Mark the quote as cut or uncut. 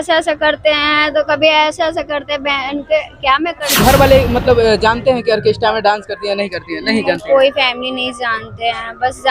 cut